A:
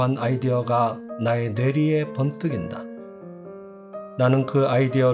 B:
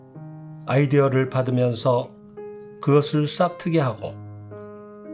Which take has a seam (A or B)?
A